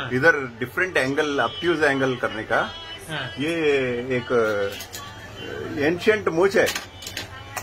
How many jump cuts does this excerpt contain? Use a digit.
0